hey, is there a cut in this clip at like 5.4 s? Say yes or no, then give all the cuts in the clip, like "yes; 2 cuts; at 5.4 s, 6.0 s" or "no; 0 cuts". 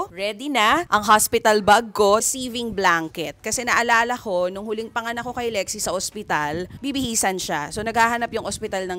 no; 2 cuts; at 2.2 s, 6.7 s